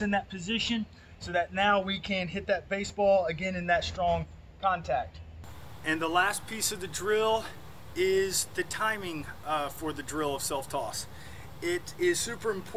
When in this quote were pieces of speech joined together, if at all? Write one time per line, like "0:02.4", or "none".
none